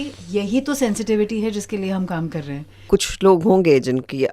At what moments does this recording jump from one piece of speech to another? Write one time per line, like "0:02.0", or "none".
0:02.8

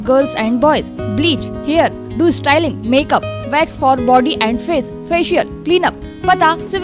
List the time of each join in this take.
none

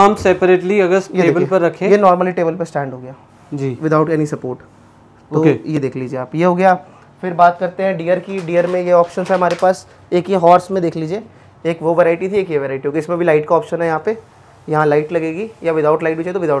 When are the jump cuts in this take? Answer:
none

